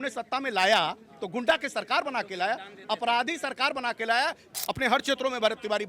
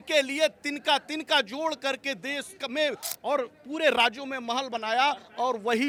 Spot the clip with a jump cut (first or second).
first